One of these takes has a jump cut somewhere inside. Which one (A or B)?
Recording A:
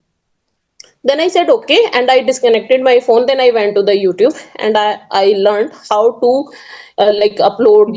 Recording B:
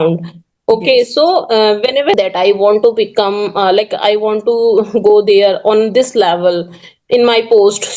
B